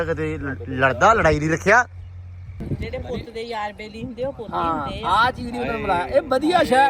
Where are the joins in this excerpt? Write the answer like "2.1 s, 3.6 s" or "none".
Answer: 2.6 s